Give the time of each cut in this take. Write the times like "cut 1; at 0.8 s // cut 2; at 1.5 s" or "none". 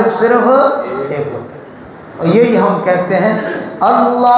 cut 1; at 2.2 s